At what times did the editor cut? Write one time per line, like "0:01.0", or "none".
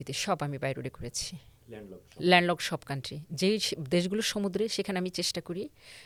none